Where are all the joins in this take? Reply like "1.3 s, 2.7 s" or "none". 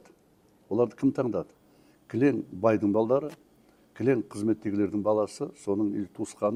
none